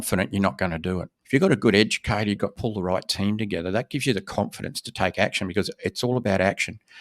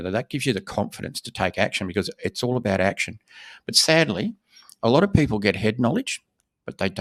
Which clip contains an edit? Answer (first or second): first